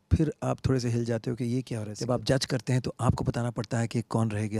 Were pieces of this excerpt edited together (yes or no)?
yes